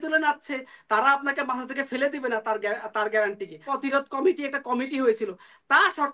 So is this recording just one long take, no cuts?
no; 1 cut; at 3.7 s

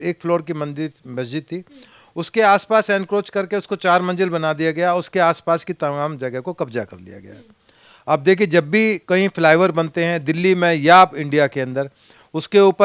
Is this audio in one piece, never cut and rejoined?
yes; 0 cuts

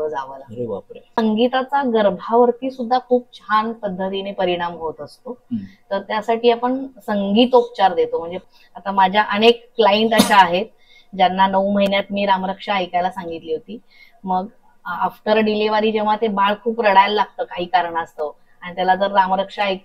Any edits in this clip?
yes; 2 cuts; at 1.1 s, 8.3 s

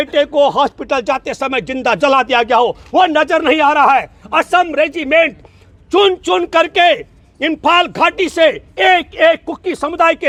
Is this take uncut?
yes; 0 cuts

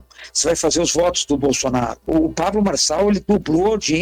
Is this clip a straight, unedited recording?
no; 1 cut; at 2.0 s

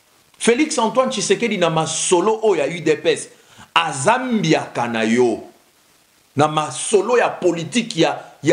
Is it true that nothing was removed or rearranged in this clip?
yes; 0 cuts

